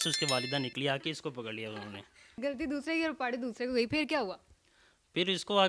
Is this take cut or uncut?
uncut